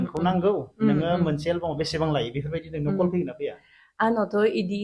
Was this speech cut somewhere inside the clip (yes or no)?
no